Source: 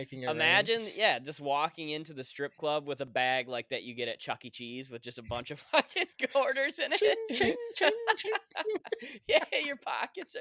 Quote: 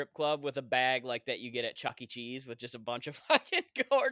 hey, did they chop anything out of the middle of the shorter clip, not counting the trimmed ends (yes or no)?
no